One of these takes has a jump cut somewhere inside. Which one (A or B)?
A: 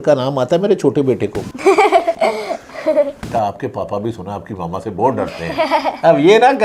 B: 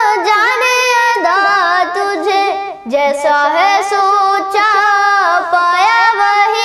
A